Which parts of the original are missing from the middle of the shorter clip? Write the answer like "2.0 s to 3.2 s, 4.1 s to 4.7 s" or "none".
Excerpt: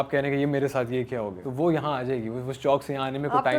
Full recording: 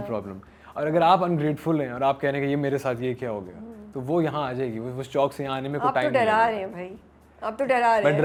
3.5 s to 3.9 s